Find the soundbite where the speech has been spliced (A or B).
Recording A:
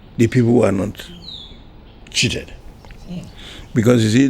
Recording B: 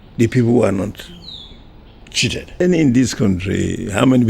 B